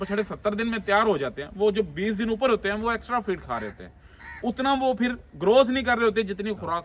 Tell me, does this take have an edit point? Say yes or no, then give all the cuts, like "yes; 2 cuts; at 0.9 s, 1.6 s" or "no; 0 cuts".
no; 0 cuts